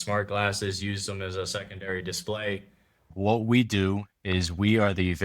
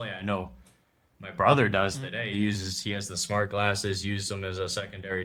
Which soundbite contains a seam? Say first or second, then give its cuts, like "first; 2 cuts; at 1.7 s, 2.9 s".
first; 1 cut; at 3.1 s